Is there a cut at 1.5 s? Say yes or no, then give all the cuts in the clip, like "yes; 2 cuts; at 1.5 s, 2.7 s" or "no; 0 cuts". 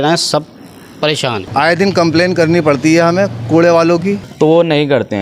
yes; 2 cuts; at 1.5 s, 4.2 s